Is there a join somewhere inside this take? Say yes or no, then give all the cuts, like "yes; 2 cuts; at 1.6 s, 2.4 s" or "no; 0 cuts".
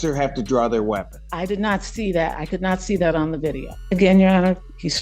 yes; 2 cuts; at 1.2 s, 3.7 s